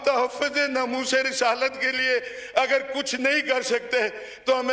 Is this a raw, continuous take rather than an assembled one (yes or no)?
yes